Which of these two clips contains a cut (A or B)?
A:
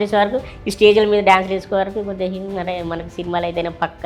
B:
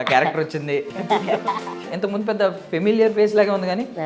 B